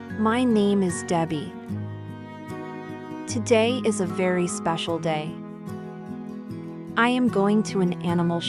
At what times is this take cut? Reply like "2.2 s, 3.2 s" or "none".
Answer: 5.2 s, 6.6 s